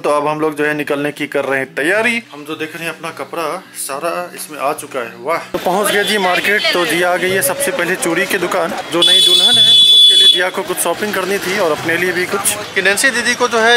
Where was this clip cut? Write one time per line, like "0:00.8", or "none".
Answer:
0:02.3
0:05.4
0:12.6